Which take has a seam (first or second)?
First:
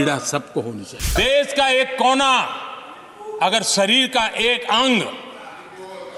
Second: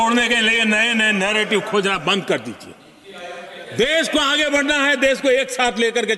first